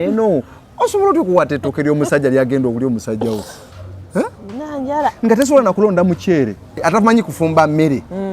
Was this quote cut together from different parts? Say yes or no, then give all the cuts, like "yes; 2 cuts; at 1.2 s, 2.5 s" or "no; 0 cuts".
yes; 1 cut; at 6.8 s